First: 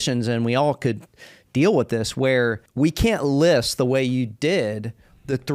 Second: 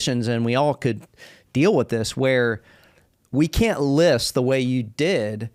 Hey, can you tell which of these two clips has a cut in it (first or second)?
first